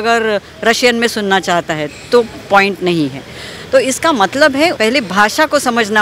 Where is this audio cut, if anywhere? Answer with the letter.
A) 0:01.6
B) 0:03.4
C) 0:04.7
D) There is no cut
C